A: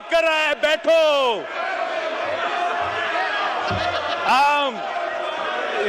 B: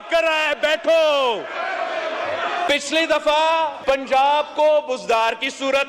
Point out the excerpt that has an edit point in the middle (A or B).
B